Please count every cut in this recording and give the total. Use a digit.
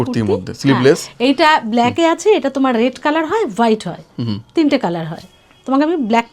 0